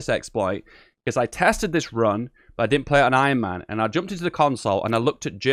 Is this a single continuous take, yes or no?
yes